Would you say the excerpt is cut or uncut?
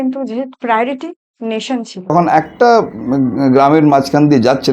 cut